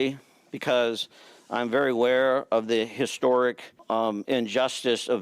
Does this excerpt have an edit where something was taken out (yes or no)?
yes